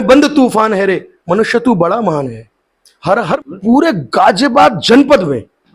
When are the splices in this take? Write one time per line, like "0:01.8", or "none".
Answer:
0:03.2